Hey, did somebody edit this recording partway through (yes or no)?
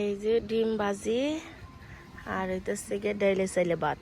no